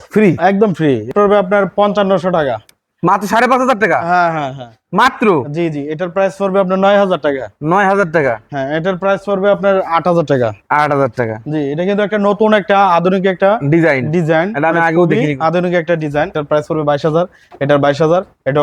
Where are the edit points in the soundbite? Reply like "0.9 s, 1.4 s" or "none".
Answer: 1.1 s, 16.4 s